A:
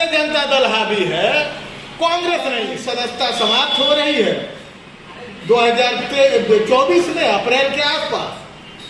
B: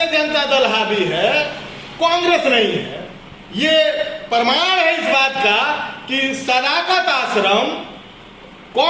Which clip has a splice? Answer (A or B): A